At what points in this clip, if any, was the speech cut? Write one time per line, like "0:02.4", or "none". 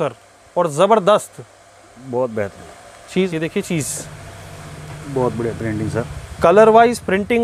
0:03.3